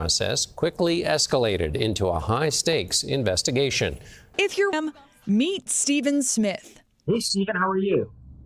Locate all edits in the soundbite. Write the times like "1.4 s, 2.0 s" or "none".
4.7 s